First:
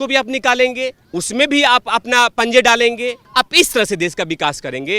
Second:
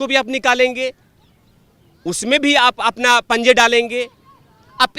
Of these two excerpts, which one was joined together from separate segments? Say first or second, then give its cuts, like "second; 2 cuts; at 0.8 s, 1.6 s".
first; 2 cuts; at 1.0 s, 3.2 s